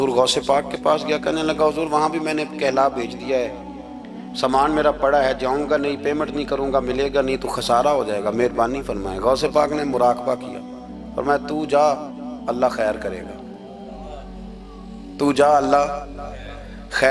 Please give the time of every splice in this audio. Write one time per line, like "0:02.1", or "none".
none